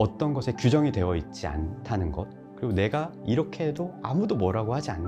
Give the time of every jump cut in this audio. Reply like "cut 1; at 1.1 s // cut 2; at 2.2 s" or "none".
cut 1; at 2.4 s